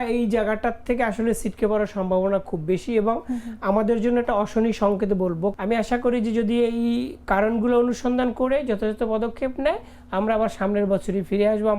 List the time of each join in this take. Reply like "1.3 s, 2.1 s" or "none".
5.5 s